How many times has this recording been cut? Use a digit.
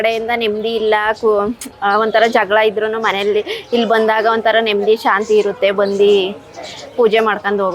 0